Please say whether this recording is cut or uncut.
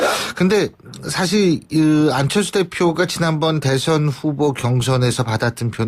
cut